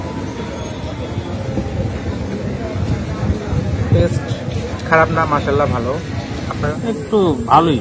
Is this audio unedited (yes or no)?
no